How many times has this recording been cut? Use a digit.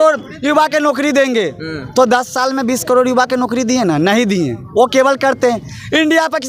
0